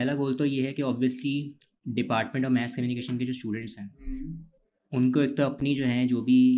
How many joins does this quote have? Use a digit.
0